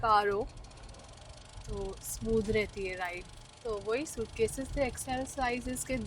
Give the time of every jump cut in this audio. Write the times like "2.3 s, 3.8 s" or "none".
3.3 s